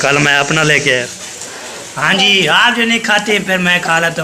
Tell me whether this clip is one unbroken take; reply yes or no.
no